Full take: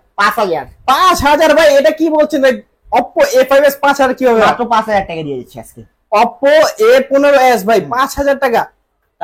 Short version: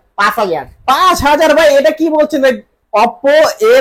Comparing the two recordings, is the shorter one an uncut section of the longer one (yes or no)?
no